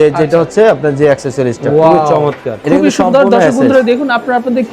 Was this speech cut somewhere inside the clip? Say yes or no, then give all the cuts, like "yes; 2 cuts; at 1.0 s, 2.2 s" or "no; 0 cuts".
yes; 1 cut; at 2.5 s